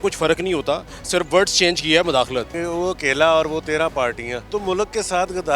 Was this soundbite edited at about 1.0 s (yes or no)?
no